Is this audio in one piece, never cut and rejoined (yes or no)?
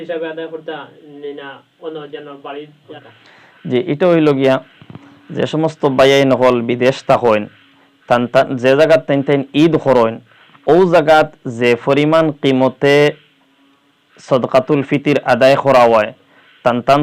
no